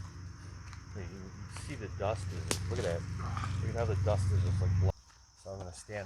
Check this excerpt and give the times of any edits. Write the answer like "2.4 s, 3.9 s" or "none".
4.9 s